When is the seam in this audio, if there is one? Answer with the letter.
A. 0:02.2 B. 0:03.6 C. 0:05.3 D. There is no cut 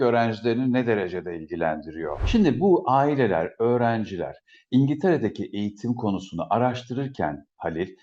A